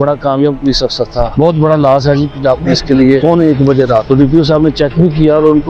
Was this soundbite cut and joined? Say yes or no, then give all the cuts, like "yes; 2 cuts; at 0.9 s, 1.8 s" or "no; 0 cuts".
yes; 2 cuts; at 1.3 s, 3.2 s